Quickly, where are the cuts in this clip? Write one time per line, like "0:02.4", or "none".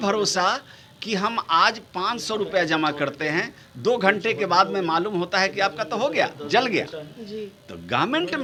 none

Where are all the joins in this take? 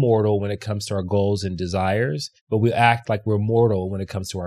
0:02.3

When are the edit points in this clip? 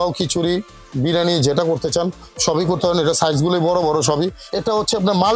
0:04.4

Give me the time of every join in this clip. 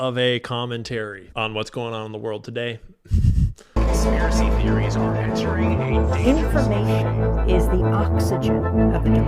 0:01.2
0:03.6

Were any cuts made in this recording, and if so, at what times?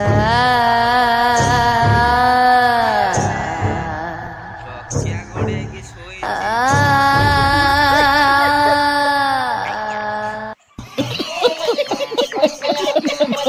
none

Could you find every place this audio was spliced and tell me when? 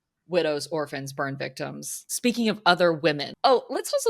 0:02.1
0:03.3

